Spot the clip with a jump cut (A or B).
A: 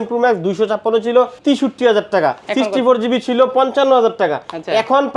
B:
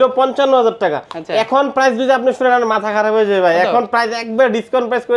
A